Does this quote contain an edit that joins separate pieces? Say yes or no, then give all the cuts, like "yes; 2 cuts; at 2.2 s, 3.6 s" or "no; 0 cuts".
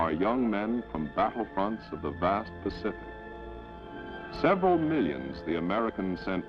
yes; 1 cut; at 1.5 s